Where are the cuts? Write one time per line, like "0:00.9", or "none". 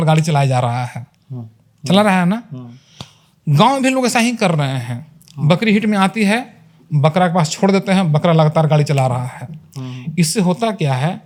none